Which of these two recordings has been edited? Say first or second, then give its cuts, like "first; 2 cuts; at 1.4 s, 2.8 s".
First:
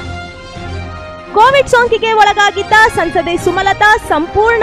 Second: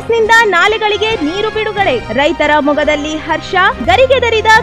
first; 1 cut; at 1.1 s